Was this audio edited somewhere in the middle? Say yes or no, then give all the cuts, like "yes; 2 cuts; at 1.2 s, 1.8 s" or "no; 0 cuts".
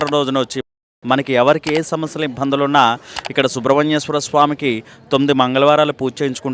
yes; 1 cut; at 0.9 s